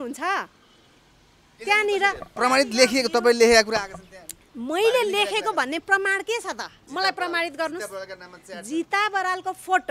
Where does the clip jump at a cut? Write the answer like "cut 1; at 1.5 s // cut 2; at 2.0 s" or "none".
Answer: none